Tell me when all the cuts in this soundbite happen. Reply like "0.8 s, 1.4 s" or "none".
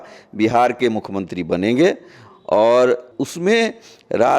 3.2 s